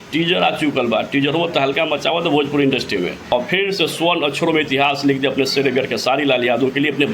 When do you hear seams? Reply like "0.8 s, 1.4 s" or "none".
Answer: 3.1 s